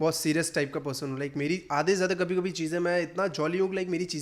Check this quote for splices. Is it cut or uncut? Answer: uncut